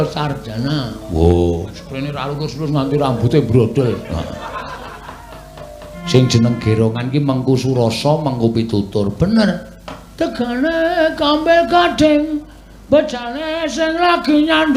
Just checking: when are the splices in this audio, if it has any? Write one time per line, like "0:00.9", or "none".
0:06.0